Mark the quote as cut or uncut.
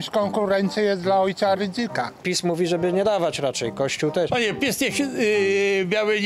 cut